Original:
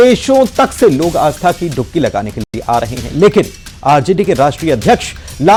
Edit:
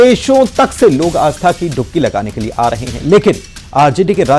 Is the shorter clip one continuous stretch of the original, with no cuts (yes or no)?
no